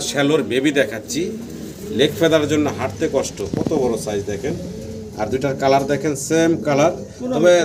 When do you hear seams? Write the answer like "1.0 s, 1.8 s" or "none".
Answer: none